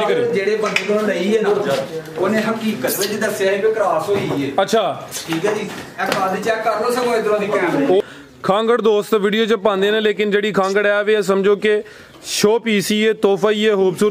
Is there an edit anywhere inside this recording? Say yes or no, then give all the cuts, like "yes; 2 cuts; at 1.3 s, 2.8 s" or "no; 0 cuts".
yes; 1 cut; at 8.0 s